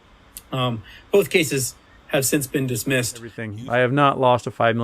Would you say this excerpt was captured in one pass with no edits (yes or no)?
no